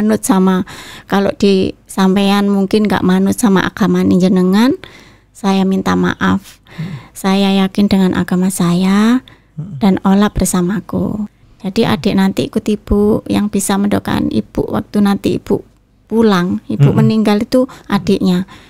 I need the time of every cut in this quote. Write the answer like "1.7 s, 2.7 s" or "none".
11.5 s